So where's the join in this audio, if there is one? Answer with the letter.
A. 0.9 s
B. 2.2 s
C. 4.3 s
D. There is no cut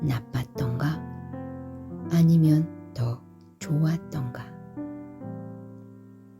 C